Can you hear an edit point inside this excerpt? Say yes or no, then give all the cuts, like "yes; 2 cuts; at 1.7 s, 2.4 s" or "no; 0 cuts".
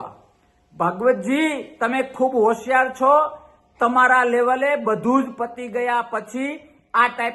no; 0 cuts